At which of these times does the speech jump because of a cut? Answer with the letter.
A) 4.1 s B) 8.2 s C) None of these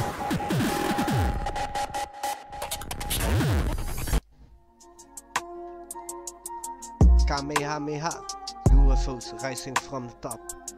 A